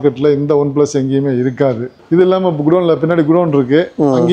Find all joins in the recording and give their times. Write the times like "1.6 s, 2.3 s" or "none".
2.0 s